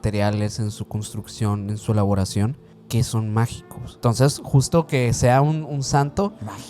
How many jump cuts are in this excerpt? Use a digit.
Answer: 2